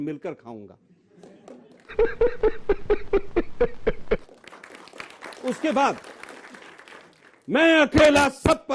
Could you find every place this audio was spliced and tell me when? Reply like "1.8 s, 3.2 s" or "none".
none